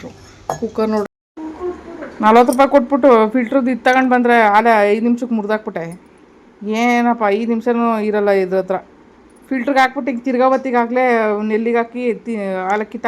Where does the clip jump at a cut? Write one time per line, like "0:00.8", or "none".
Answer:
0:01.2